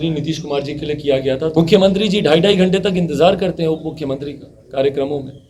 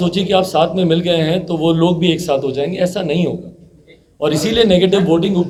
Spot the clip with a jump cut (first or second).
first